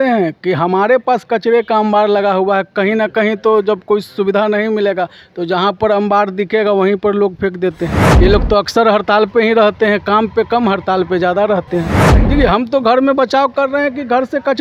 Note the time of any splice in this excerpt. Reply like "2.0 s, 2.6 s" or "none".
8.0 s, 12.1 s